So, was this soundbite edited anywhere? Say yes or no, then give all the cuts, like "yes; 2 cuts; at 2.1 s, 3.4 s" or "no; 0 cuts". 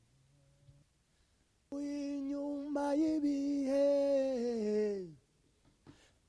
yes; 1 cut; at 1.7 s